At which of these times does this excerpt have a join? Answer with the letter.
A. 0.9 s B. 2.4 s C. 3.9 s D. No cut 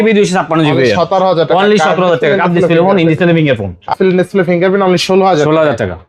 C